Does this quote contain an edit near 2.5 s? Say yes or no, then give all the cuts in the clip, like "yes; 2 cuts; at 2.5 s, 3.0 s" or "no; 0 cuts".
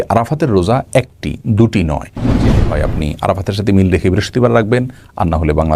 yes; 1 cut; at 2.5 s